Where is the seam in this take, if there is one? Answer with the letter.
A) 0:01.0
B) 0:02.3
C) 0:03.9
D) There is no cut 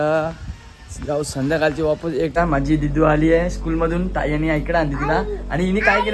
B